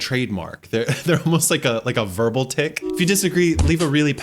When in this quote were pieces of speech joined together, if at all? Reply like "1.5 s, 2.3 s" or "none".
2.9 s